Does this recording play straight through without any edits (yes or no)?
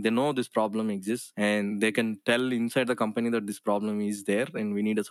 yes